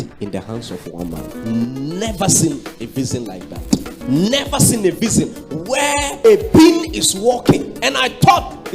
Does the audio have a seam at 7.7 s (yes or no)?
no